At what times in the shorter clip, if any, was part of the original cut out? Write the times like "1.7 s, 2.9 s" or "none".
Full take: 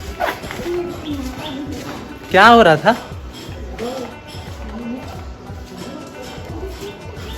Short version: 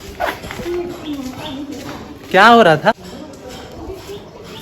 2.9 s